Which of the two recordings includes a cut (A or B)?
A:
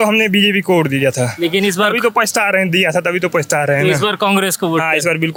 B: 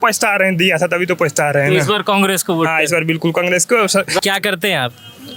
B